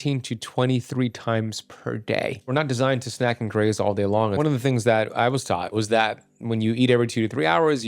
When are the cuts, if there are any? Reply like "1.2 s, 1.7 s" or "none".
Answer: 2.5 s, 4.4 s, 5.7 s